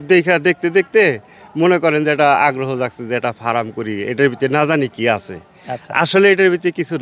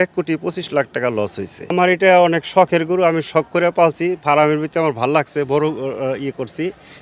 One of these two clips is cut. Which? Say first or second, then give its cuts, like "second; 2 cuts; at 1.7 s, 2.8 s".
second; 1 cut; at 1.7 s